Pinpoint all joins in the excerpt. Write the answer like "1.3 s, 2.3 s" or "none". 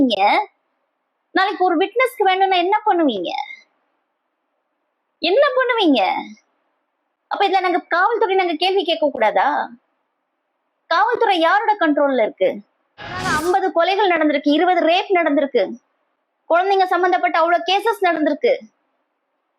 13.3 s

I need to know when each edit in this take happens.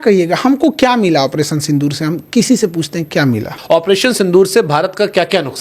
3.5 s

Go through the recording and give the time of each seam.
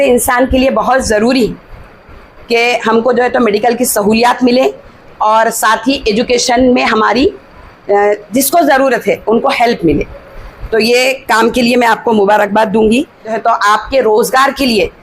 13.3 s

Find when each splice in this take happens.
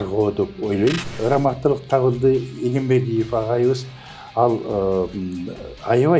1.2 s

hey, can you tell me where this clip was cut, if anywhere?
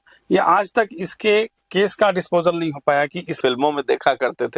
3.4 s

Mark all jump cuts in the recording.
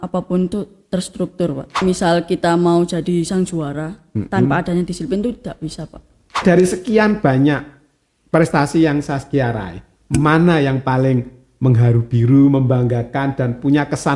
1.8 s, 6.4 s

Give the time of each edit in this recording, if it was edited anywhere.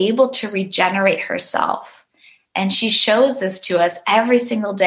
none

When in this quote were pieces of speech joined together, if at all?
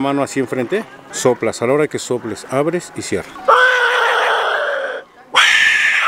1.0 s, 3.3 s

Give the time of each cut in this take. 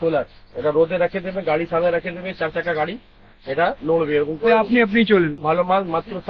5.4 s

